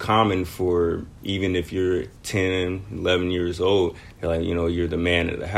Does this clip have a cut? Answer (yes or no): yes